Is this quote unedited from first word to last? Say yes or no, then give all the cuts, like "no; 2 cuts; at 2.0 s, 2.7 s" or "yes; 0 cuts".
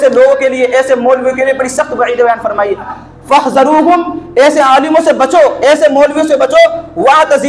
no; 1 cut; at 2.9 s